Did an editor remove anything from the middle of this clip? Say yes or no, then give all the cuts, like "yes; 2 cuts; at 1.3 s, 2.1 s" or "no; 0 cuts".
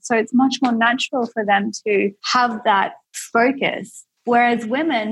yes; 1 cut; at 2.7 s